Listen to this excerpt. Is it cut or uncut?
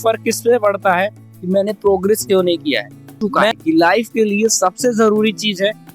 cut